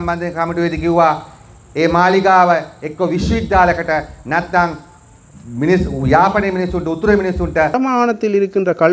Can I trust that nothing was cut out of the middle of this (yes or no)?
no